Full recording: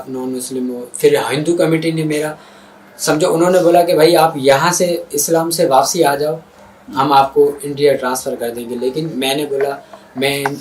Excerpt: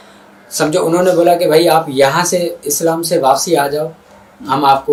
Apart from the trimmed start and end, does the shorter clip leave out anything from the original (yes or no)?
no